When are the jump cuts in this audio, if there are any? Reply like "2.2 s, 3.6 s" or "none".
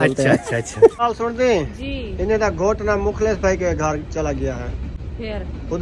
1.0 s